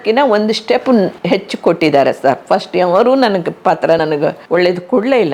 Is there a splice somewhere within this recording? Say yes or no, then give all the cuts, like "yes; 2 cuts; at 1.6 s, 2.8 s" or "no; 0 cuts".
yes; 2 cuts; at 0.9 s, 4.1 s